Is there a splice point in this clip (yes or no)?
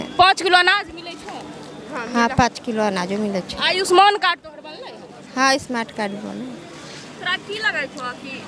no